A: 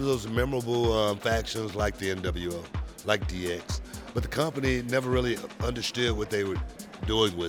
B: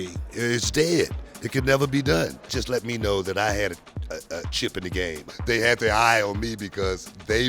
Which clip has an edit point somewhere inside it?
B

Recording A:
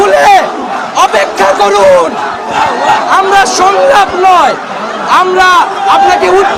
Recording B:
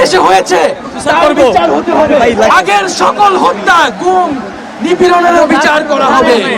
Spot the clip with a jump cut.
B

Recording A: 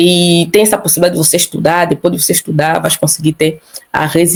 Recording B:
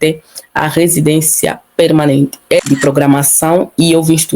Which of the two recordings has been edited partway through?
B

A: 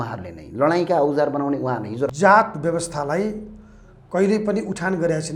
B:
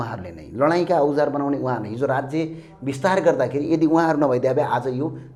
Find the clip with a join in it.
A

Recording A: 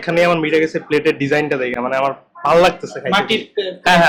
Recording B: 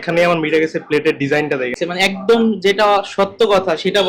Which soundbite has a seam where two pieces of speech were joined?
B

